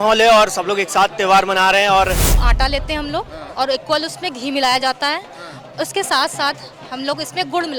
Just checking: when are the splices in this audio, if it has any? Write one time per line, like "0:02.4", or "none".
0:02.4